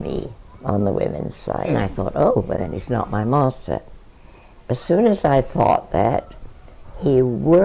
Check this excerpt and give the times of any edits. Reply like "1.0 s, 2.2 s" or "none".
1.7 s